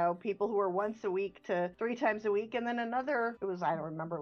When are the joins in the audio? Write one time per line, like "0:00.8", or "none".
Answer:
0:01.7
0:03.4